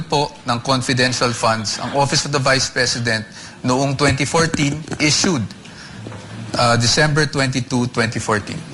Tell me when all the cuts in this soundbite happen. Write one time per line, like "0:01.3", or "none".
none